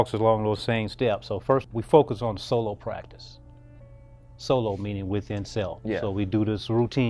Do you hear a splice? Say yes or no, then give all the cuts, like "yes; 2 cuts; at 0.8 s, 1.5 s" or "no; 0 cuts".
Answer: yes; 1 cut; at 1.7 s